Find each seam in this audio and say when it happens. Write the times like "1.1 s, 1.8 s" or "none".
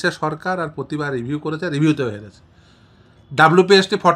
none